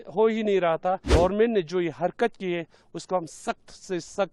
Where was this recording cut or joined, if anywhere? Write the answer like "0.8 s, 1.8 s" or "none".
1.1 s